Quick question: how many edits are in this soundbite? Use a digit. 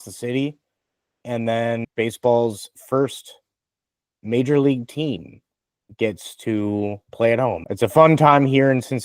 2